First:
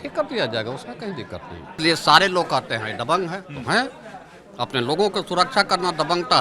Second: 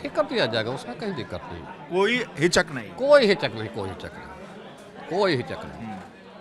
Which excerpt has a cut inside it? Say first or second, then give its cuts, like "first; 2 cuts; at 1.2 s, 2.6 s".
first; 1 cut; at 1.8 s